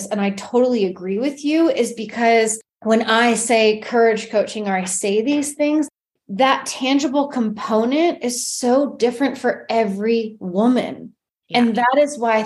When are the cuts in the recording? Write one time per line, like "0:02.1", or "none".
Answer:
0:02.7